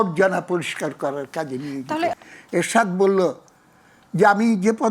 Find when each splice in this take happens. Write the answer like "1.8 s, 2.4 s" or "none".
2.2 s